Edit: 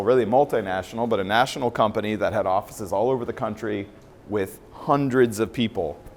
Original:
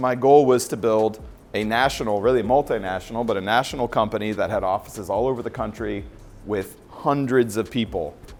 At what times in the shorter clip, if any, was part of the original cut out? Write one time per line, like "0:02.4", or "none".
none

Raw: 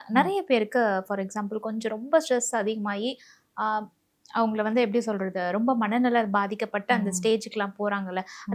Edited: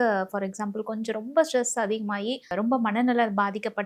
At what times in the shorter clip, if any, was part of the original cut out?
0:02.5

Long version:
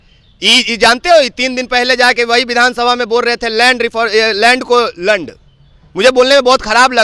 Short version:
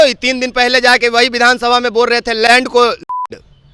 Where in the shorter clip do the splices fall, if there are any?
0:02.5

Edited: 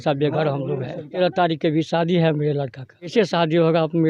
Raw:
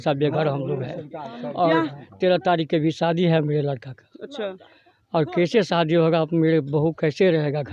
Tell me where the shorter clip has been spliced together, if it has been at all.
0:01.1
0:03.1

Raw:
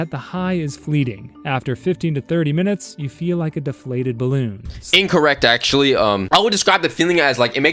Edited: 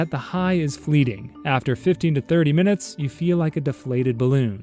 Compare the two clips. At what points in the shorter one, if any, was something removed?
none

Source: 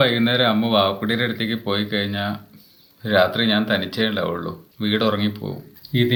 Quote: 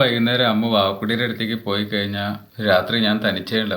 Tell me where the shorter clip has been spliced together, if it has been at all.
0:02.5

